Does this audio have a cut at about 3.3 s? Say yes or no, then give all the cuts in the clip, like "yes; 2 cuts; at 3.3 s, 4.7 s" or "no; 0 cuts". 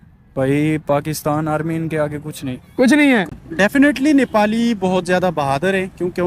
yes; 1 cut; at 3.3 s